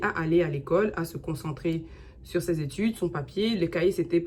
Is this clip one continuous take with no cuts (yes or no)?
yes